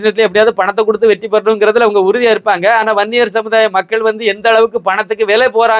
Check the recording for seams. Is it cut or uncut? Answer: uncut